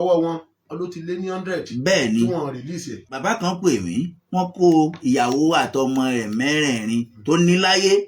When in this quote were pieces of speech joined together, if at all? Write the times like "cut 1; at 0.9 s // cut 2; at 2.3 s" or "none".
cut 1; at 3.1 s